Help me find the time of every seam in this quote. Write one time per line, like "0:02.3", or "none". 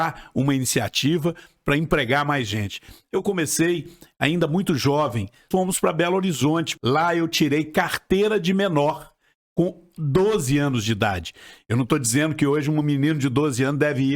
0:05.5
0:06.7